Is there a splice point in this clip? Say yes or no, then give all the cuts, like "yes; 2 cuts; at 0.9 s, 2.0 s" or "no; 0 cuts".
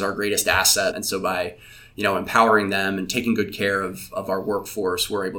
yes; 1 cut; at 0.9 s